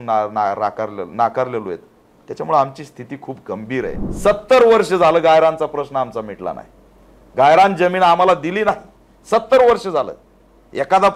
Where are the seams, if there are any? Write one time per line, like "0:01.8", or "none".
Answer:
0:04.0